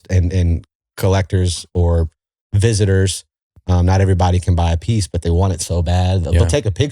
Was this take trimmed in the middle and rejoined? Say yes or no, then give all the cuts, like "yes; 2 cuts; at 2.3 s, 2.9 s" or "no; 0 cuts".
no; 0 cuts